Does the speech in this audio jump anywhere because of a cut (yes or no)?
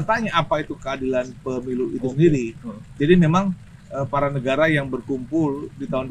no